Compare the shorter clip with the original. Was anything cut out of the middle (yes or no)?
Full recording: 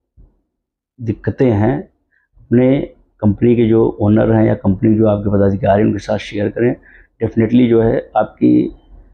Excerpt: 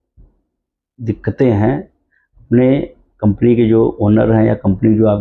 no